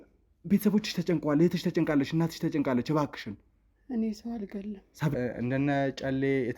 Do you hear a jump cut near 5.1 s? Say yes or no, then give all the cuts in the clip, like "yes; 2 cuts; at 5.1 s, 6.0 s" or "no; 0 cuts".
yes; 1 cut; at 5.1 s